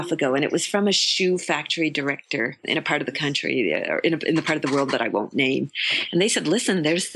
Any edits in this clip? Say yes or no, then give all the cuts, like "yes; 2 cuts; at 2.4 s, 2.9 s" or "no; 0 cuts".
no; 0 cuts